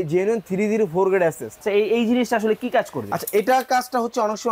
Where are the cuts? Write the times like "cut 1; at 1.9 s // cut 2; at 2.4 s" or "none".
cut 1; at 1.5 s